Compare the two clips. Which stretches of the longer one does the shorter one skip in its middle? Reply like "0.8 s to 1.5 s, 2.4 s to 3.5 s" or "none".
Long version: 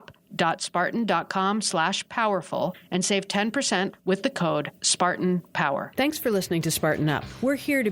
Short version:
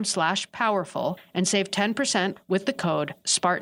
none